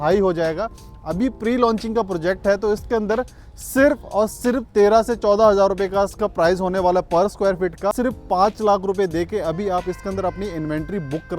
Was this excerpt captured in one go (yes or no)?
no